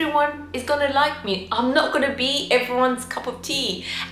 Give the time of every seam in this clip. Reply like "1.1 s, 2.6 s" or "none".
none